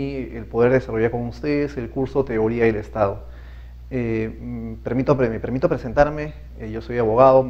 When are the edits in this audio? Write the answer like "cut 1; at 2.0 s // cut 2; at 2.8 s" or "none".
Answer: none